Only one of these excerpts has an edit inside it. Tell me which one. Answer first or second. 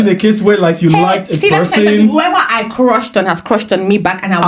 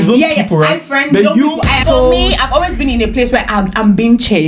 second